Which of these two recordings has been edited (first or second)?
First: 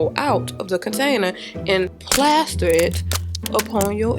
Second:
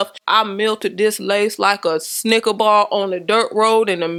first